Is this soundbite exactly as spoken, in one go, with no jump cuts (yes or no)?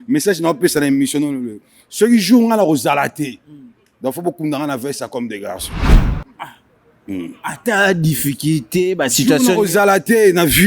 yes